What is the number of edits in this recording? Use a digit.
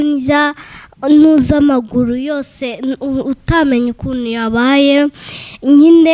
0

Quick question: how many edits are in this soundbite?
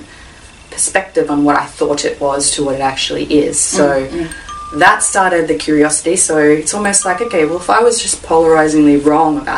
0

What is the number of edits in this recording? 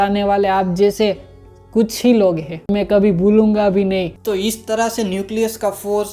2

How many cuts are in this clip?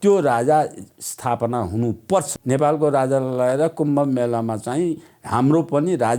1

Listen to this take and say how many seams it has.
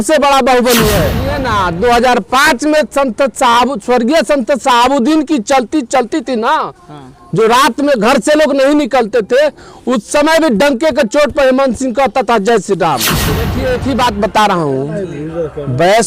2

